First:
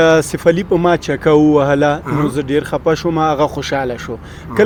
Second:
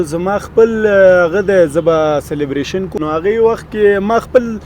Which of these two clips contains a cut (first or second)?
second